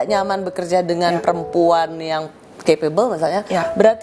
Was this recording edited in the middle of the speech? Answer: no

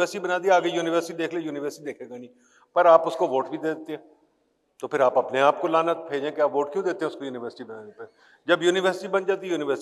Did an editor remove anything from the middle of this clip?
no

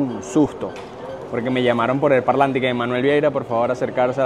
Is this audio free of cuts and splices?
yes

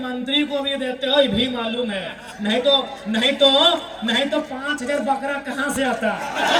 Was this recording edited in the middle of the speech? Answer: no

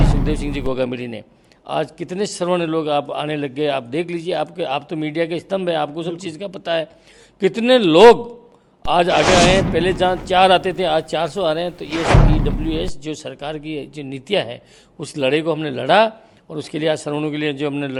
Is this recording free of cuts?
yes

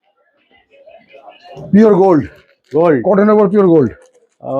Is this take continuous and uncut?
no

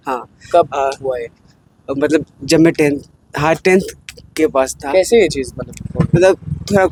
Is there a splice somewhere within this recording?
no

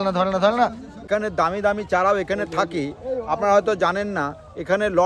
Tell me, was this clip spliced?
yes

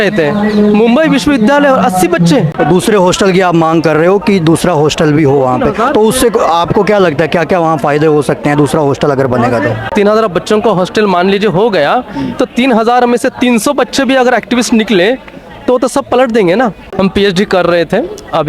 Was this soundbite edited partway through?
yes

